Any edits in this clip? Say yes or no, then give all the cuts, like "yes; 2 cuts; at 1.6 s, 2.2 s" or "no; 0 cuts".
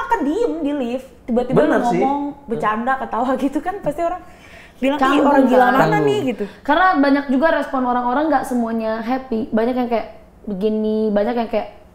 no; 0 cuts